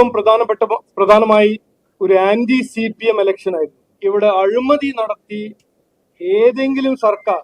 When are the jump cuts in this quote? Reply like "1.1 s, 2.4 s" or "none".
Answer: 3.8 s